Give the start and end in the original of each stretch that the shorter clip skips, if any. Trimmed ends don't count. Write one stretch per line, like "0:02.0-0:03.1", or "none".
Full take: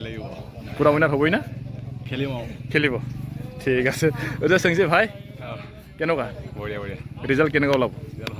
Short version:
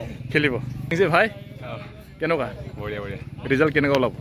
0:03.3-0:04.7